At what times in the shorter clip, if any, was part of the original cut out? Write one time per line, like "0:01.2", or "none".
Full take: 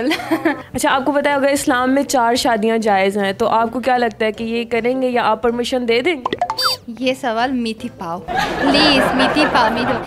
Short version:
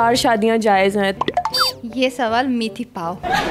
0:01.1